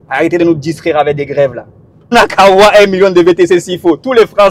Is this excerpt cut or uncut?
cut